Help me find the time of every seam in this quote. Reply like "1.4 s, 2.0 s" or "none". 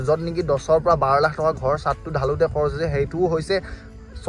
none

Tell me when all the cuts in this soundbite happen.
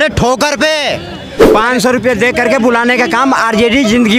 1.5 s

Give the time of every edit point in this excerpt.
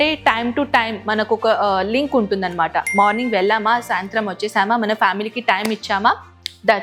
none

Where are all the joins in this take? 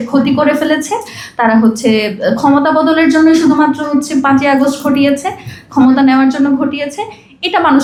none

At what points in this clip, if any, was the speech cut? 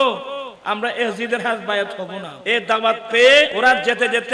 2.3 s, 3.5 s

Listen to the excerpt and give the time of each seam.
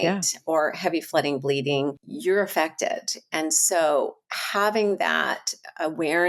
2.1 s

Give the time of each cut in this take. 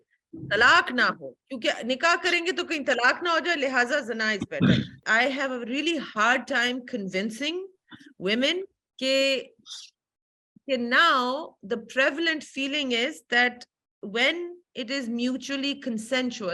5.0 s, 8.8 s

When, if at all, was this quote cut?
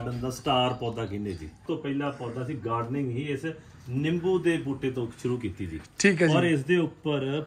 1.6 s

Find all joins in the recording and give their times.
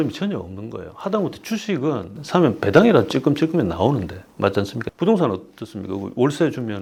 none

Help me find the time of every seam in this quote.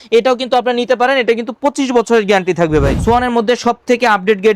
2.9 s

